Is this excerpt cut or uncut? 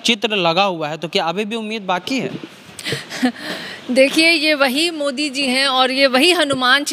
uncut